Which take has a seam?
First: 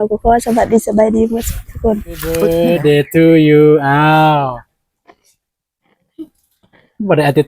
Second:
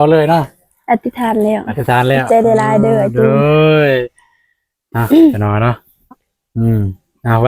first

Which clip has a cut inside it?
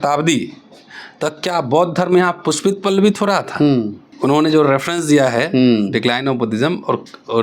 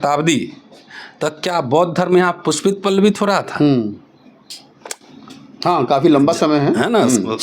first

